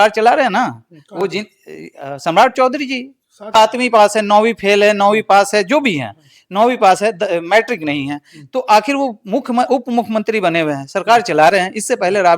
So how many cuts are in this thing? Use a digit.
0